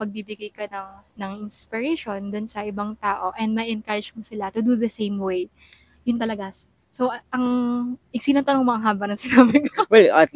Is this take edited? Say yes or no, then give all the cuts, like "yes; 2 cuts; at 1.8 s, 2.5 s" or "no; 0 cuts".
no; 0 cuts